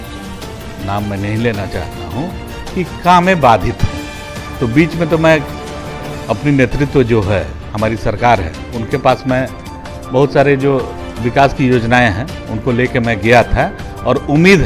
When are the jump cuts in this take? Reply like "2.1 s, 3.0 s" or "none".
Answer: none